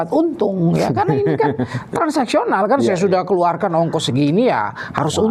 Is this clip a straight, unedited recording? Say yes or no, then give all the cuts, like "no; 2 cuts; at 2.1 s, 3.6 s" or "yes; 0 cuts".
yes; 0 cuts